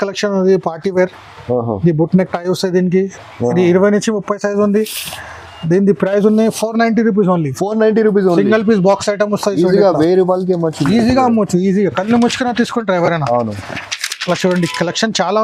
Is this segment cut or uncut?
uncut